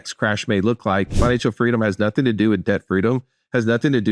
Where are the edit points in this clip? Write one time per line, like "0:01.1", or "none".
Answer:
0:01.2